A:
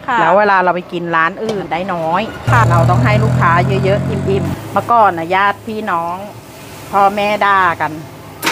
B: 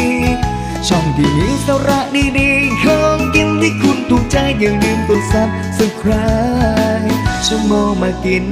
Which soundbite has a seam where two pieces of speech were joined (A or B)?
A